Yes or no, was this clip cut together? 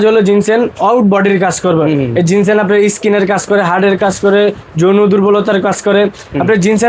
no